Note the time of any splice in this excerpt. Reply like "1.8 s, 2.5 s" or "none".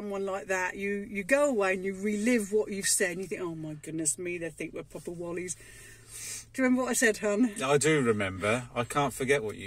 none